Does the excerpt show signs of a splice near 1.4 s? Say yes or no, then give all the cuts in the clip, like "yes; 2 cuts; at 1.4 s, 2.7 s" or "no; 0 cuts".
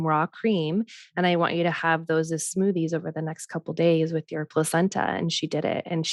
no; 0 cuts